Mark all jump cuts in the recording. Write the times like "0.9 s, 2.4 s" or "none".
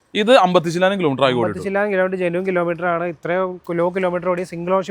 none